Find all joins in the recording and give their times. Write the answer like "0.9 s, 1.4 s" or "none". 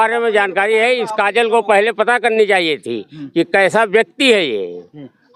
none